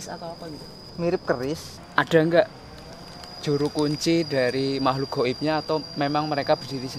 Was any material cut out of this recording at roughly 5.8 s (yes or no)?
no